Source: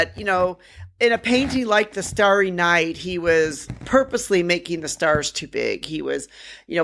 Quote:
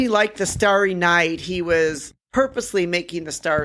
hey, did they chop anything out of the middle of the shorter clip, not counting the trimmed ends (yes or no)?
no